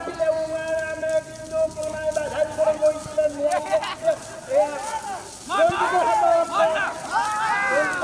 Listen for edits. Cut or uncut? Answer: uncut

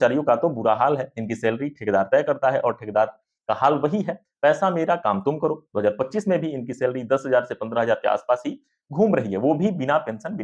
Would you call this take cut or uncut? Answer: uncut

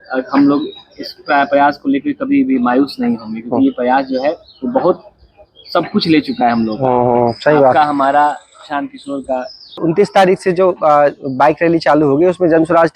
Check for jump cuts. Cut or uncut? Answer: cut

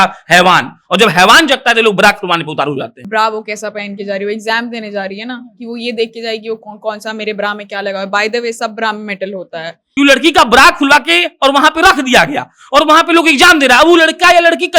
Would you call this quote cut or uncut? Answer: cut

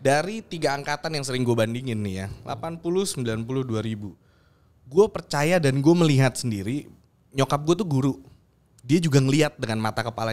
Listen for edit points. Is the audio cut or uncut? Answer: uncut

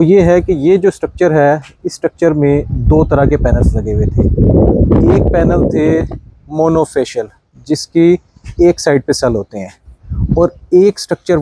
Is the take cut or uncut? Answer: uncut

